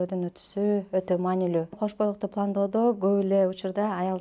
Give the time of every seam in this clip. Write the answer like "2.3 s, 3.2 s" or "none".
1.8 s